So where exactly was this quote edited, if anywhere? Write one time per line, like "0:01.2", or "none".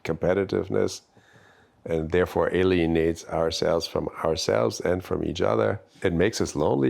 0:06.0